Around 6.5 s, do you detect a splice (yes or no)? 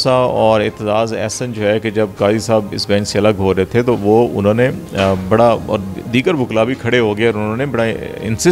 no